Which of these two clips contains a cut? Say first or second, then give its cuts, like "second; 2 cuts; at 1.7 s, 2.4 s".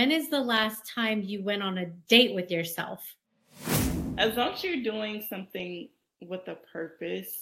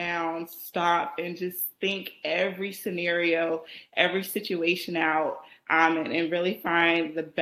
first; 1 cut; at 3.7 s